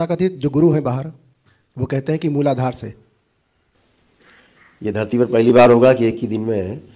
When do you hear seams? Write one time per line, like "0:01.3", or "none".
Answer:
0:03.8